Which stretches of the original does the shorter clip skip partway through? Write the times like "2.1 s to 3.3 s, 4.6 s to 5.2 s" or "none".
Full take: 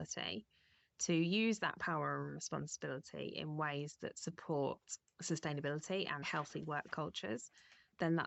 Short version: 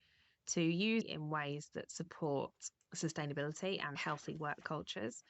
1.6 s to 3.3 s